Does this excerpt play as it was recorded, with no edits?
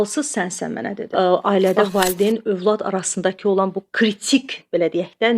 no; 1 cut; at 1.0 s

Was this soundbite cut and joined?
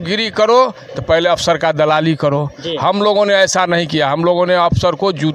no; 0 cuts

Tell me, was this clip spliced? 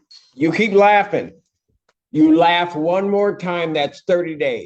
no; 0 cuts

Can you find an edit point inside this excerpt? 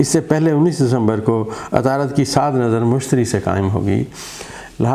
no; 0 cuts

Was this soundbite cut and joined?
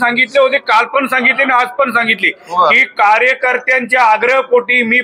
no; 0 cuts

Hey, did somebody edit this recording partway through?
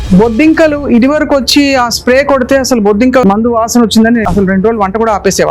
yes; 2 cuts; at 3.2 s, 4.2 s

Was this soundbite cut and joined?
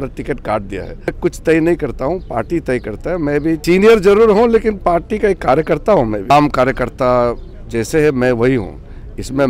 yes; 3 cuts; at 1.1 s, 3.6 s, 6.3 s

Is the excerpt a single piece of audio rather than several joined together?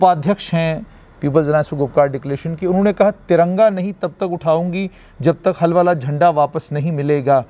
yes; 0 cuts

